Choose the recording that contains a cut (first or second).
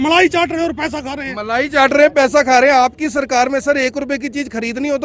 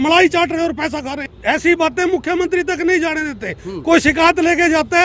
second